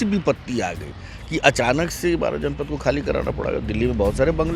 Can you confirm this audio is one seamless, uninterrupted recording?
yes; 0 cuts

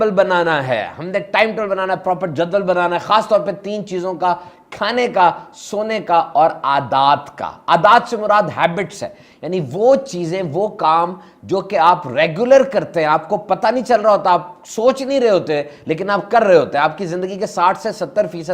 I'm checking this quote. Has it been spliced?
no; 0 cuts

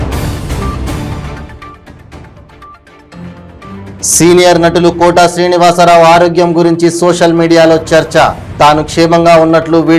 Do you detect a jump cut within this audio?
yes; 1 cut; at 1.2 s

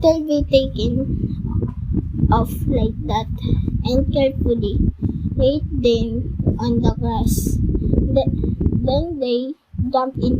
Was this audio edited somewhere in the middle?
yes; 1 cut; at 7.8 s

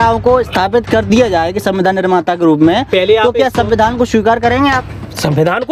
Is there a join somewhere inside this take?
no; 0 cuts

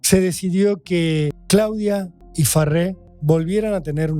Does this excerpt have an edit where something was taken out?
yes; 3 cuts; at 1.4 s, 2.2 s, 3.1 s

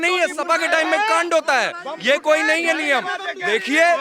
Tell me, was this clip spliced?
no; 0 cuts

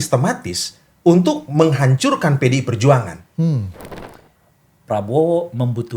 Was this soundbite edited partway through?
yes; 1 cut; at 3.9 s

